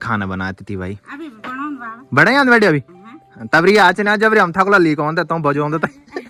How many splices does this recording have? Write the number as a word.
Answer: zero